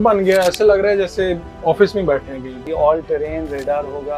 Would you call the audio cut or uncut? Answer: cut